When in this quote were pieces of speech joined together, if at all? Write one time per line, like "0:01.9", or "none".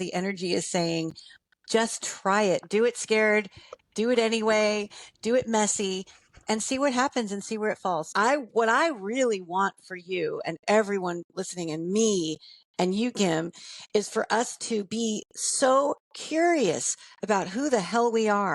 0:08.1